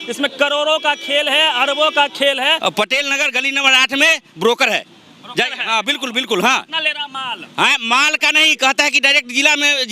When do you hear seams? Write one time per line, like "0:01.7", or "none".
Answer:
0:02.6